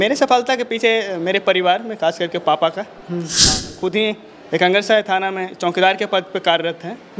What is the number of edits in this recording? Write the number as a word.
one